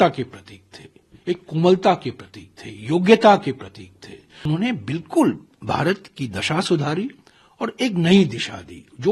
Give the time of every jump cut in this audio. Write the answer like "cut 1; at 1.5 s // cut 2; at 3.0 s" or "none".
cut 1; at 4.5 s